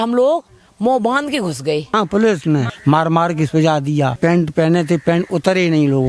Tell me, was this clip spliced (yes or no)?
yes